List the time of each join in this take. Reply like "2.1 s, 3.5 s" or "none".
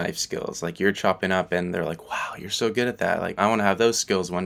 none

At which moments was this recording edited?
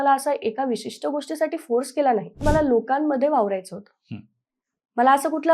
2.4 s

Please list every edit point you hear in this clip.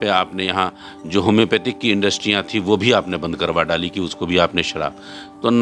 none

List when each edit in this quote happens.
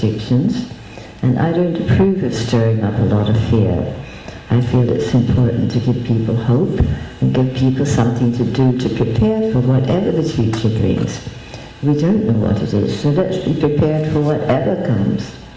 none

